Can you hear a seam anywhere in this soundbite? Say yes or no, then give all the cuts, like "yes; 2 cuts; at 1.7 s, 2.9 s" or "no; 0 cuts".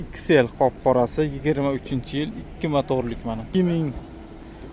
yes; 1 cut; at 3.4 s